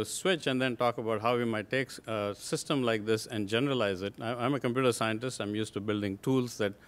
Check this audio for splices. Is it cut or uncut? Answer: cut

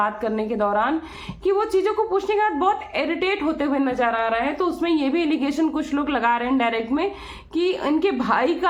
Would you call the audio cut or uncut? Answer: uncut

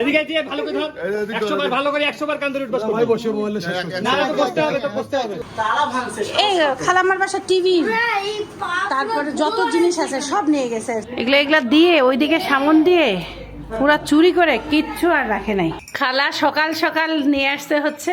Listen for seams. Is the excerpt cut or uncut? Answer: cut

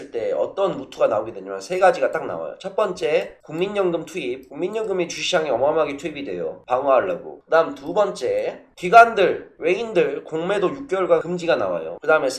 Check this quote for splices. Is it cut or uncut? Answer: uncut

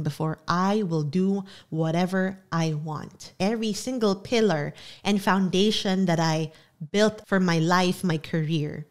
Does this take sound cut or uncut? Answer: cut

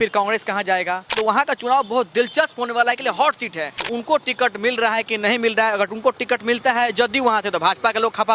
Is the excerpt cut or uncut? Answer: cut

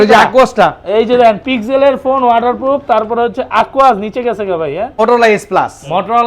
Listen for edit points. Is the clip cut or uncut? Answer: cut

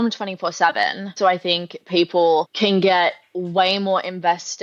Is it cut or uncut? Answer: cut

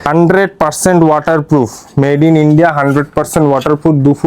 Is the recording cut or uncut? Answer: uncut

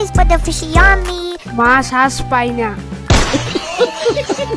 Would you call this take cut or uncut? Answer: uncut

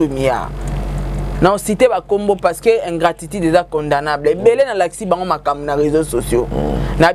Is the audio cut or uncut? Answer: uncut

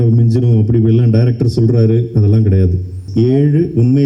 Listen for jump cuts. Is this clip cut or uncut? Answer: cut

